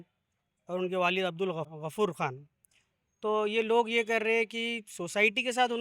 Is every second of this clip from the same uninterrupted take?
no; 1 cut; at 1.7 s

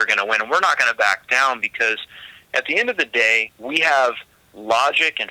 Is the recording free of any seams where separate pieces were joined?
no; 1 cut; at 3.5 s

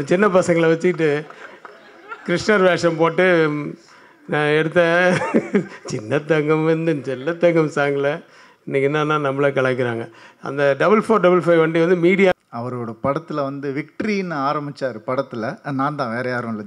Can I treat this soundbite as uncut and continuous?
no; 1 cut; at 12.3 s

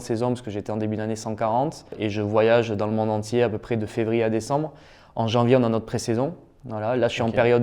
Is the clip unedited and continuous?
no; 1 cut; at 2.0 s

